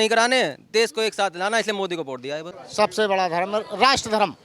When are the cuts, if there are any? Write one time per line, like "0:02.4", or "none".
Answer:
0:02.6